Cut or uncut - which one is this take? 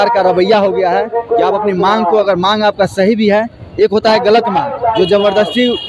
uncut